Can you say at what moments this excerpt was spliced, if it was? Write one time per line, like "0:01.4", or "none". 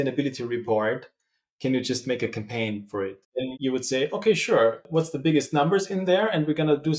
0:03.3
0:04.9